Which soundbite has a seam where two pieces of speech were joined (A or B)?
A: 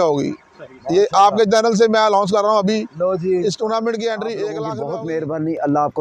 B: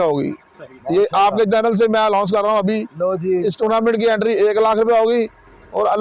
A